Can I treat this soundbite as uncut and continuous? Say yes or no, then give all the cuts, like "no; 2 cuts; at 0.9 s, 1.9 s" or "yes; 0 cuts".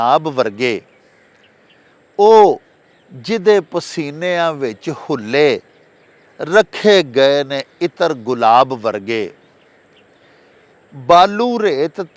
yes; 0 cuts